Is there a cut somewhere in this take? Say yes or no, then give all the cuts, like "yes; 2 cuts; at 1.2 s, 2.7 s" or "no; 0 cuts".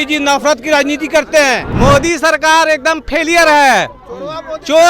yes; 1 cut; at 1.7 s